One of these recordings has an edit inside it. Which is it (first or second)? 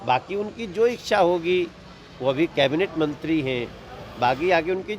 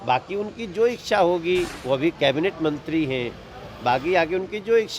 second